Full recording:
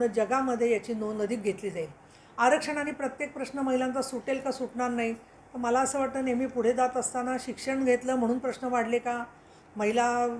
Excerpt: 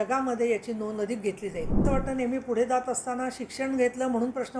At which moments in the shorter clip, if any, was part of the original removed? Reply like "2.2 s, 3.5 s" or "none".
1.8 s